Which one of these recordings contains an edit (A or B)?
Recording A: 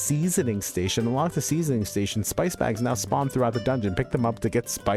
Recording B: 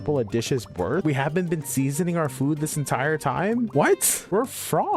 B